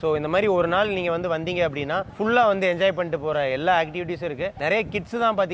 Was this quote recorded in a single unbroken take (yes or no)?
yes